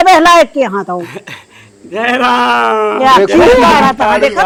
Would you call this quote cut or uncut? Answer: uncut